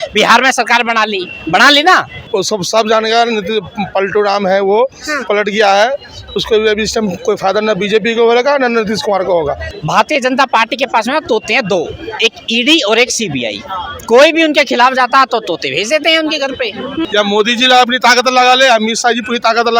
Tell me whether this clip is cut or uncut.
cut